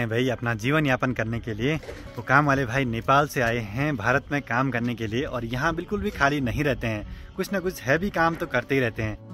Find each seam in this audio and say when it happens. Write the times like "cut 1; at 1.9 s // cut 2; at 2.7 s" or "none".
none